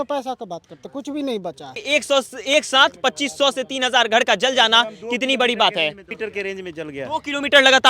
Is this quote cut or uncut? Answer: cut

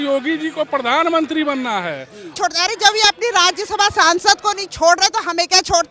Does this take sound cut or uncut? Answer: cut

